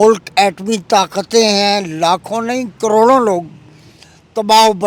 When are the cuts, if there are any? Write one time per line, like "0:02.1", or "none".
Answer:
none